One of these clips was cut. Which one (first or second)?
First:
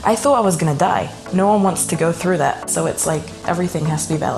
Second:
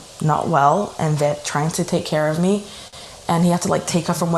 first